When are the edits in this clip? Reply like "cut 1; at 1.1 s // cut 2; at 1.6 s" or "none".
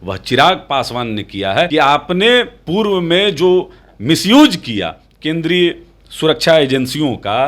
cut 1; at 1.7 s